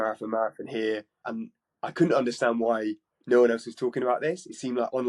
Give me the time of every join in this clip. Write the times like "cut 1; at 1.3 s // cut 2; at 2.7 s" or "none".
cut 1; at 1.3 s